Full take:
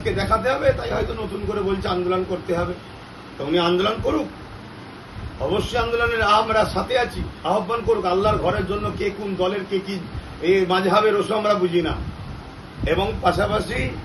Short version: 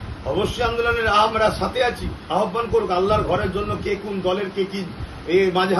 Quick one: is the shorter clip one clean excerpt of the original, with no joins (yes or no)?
yes